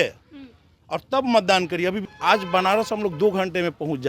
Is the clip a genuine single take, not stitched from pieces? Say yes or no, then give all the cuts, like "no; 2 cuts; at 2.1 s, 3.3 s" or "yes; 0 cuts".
no; 1 cut; at 2.0 s